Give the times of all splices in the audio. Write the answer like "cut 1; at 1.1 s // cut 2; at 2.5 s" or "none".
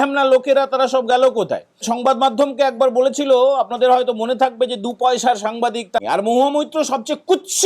cut 1; at 1.9 s // cut 2; at 6.0 s

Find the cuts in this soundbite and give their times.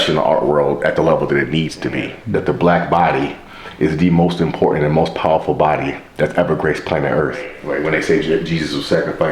cut 1; at 2.1 s // cut 2; at 7.6 s

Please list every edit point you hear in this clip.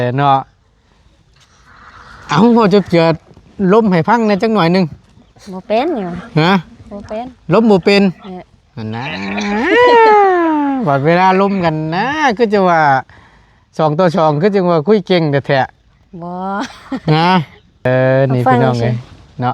cut 1; at 17.9 s

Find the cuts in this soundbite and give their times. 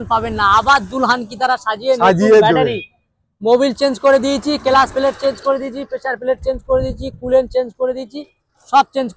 none

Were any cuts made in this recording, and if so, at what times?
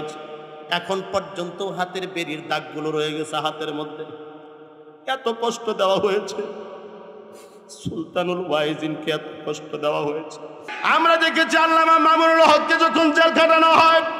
cut 1; at 10.7 s

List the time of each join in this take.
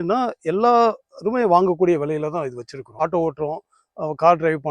cut 1; at 3.0 s

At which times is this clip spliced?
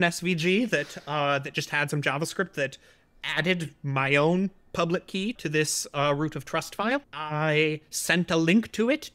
cut 1; at 5.4 s // cut 2; at 7.2 s

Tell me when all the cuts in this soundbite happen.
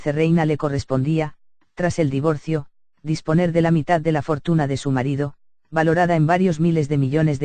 cut 1; at 2.4 s

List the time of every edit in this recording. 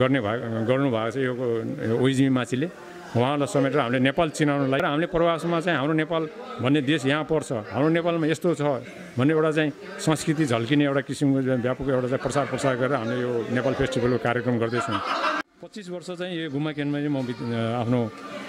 cut 1; at 4.8 s // cut 2; at 15.4 s

